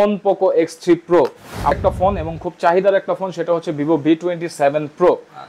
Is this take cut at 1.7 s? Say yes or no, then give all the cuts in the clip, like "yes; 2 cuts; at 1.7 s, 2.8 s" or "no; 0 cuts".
yes; 1 cut; at 1.7 s